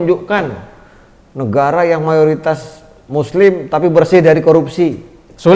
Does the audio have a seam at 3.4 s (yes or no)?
no